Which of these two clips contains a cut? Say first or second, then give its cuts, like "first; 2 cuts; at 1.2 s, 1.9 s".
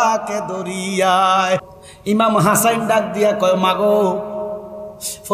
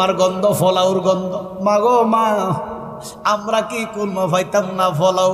first; 1 cut; at 1.7 s